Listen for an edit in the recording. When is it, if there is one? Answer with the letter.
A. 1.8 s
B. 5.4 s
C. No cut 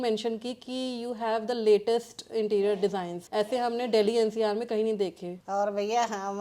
B